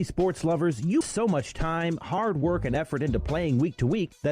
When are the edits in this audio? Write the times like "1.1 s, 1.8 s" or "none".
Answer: 1.1 s